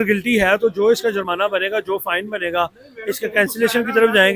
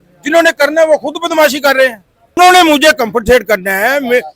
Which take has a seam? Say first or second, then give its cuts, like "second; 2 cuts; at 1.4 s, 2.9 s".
second; 1 cut; at 2.4 s